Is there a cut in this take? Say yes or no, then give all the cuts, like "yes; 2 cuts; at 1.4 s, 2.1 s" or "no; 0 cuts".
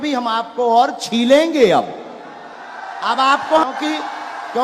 yes; 1 cut; at 3.7 s